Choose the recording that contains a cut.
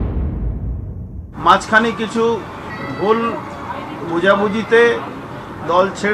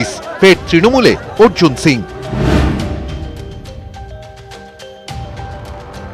first; 2 cuts; at 0.9 s, 2.7 s

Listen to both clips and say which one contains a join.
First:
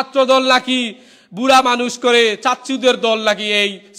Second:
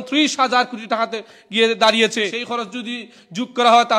second; 1 cut; at 2.4 s

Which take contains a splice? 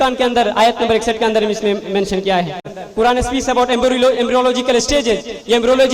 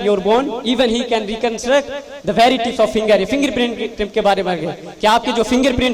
first; 1 cut; at 2.8 s

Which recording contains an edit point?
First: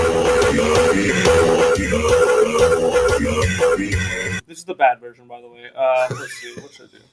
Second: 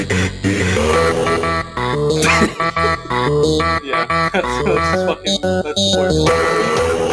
first; 1 cut; at 6.1 s

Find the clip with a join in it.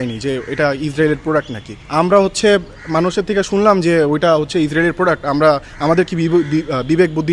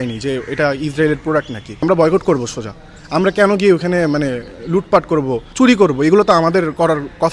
second; 1 cut; at 1.8 s

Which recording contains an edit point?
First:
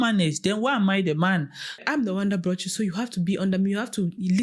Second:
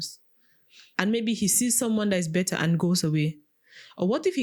first; 1 cut; at 1.8 s

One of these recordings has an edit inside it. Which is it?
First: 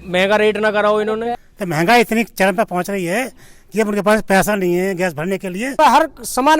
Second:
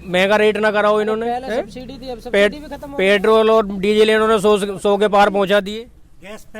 first; 2 cuts; at 1.4 s, 5.7 s

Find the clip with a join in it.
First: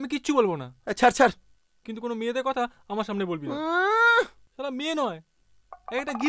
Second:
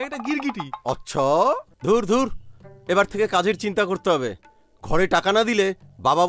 second; 1 cut; at 1.7 s

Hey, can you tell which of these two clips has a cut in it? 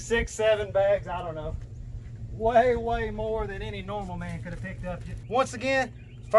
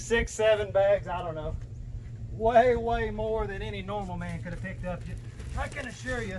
first; 1 cut; at 5.1 s

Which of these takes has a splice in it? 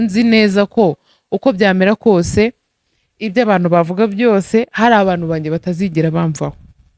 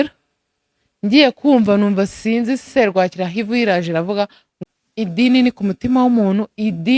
second; 1 cut; at 4.5 s

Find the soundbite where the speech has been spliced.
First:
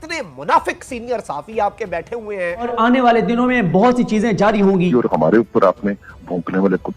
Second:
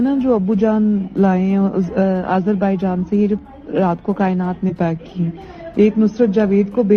first; 2 cuts; at 2.7 s, 4.9 s

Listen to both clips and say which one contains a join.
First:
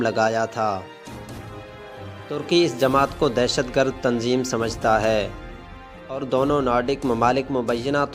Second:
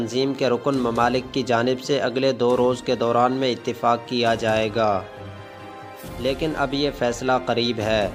first; 2 cuts; at 1.0 s, 2.3 s

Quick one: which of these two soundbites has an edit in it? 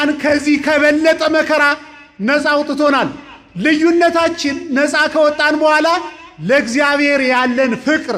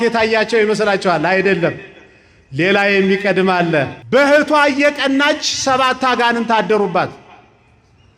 second; 1 cut; at 4.0 s

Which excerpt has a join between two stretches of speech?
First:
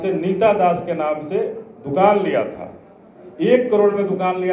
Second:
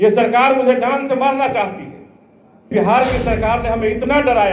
second; 1 cut; at 2.7 s

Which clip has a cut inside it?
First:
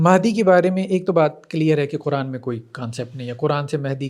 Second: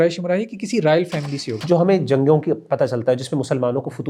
second; 1 cut; at 1.4 s

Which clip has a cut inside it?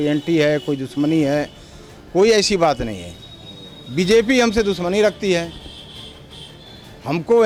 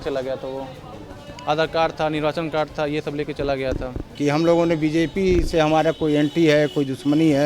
second; 1 cut; at 4.1 s

